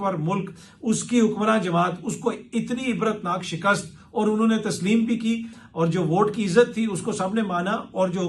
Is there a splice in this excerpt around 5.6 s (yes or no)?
yes